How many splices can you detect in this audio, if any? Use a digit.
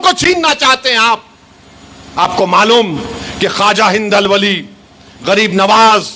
0